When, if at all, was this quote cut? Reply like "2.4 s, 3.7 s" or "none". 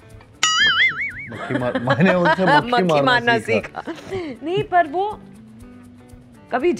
none

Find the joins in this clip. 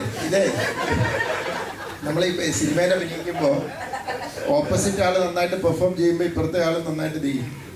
none

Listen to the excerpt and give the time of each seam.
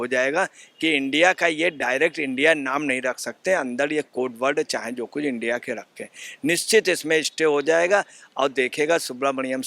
none

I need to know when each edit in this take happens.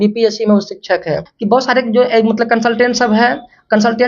1.3 s

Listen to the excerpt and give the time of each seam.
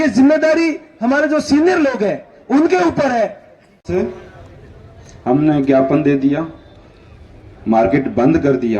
3.7 s

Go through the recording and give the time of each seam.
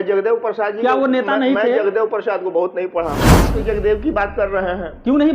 3.6 s

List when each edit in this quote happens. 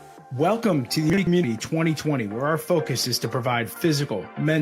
1.2 s

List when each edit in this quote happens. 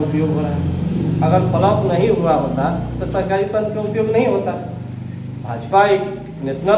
none

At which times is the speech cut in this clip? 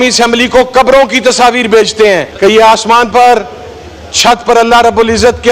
2.3 s

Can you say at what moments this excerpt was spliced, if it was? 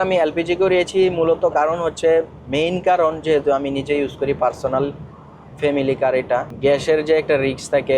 6.5 s

